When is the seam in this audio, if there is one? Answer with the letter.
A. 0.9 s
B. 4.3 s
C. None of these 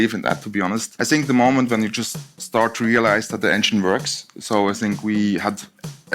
A